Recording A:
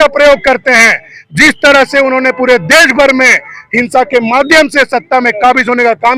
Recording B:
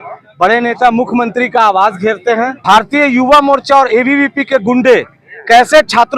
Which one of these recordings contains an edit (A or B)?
B